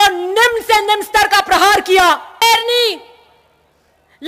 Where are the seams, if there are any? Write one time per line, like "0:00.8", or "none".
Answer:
0:02.4